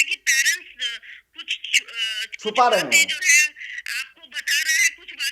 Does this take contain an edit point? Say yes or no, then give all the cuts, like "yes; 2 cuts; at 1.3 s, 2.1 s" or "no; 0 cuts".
no; 0 cuts